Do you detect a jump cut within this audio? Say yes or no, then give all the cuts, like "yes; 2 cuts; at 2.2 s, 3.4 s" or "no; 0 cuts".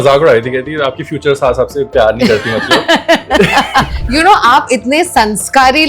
yes; 1 cut; at 3.9 s